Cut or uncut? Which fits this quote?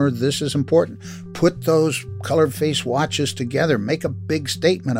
uncut